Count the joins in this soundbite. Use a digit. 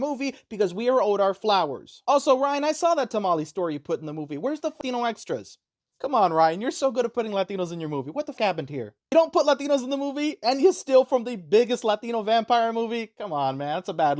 2